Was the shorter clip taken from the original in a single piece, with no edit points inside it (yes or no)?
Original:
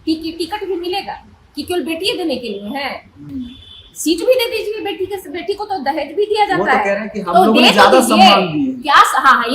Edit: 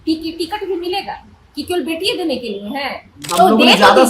no